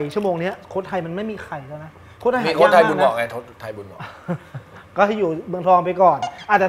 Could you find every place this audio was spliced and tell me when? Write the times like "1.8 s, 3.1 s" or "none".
none